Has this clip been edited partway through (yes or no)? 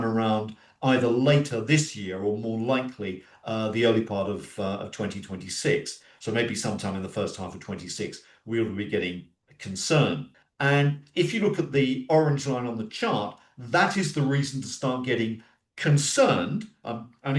yes